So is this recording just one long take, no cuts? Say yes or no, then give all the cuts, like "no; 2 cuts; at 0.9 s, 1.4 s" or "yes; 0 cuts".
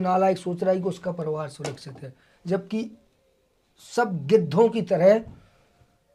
yes; 0 cuts